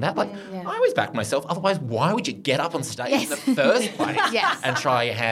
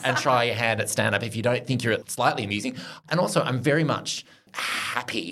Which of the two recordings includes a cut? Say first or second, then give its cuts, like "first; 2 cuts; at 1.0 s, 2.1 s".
second; 2 cuts; at 2.1 s, 2.9 s